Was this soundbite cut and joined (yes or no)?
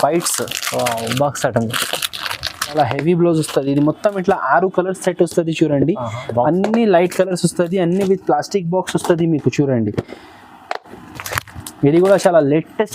yes